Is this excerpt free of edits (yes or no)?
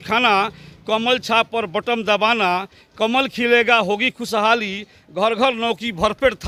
yes